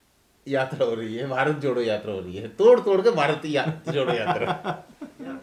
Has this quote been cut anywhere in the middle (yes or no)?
no